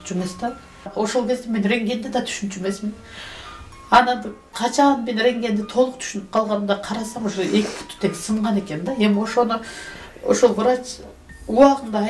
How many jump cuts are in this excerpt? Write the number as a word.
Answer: one